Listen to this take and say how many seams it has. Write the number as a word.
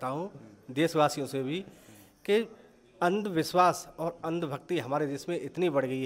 zero